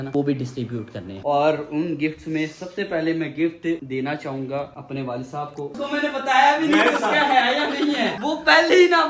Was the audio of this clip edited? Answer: yes; 2 cuts; at 1.2 s, 5.8 s

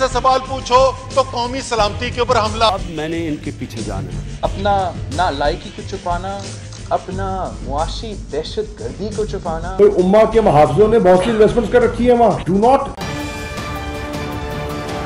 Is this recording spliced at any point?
yes; 1 cut; at 12.9 s

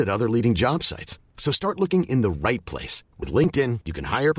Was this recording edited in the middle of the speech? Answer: no; 0 cuts

